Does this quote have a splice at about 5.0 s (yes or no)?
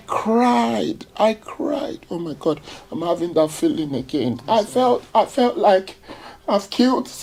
no